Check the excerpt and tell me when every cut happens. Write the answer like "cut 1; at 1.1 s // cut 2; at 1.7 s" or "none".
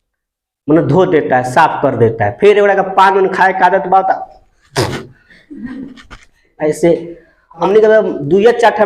cut 1; at 7.6 s